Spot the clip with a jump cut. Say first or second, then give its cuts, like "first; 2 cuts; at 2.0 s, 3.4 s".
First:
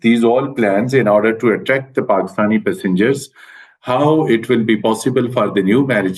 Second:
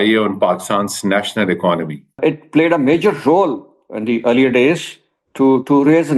second; 1 cut; at 2.2 s